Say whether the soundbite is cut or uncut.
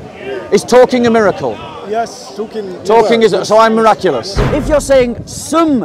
cut